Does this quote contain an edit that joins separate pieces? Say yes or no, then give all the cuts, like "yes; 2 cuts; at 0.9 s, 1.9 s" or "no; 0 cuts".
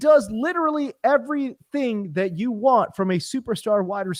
no; 0 cuts